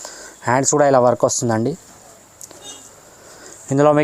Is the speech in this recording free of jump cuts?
yes; 0 cuts

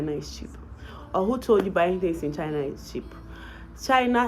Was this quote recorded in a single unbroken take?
yes; 0 cuts

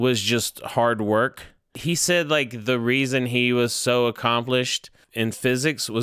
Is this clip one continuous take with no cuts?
no; 2 cuts; at 1.8 s, 5.0 s

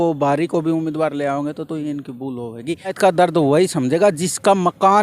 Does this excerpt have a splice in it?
yes; 1 cut; at 2.9 s

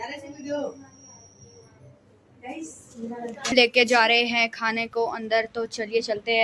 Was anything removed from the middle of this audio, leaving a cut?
yes; 1 cut; at 3.5 s

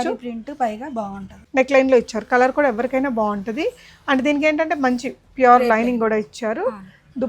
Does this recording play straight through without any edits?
no; 1 cut; at 1.4 s

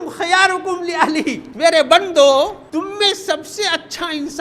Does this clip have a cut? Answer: yes; 2 cuts; at 1.5 s, 2.6 s

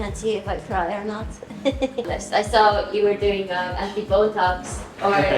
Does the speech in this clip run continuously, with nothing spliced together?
no; 1 cut; at 2.2 s

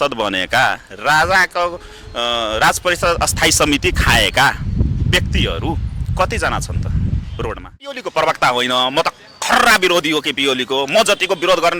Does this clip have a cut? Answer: yes; 1 cut; at 8.0 s

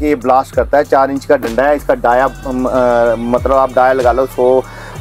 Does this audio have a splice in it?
no; 0 cuts

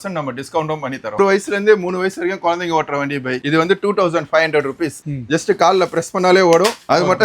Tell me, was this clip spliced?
yes; 2 cuts; at 1.2 s, 5.0 s

